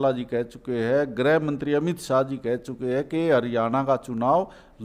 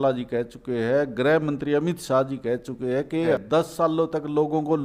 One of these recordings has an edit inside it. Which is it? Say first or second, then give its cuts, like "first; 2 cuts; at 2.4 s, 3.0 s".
second; 1 cut; at 3.3 s